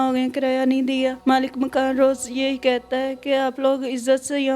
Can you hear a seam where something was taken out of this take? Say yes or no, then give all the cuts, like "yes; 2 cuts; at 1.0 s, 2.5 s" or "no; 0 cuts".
yes; 1 cut; at 1.2 s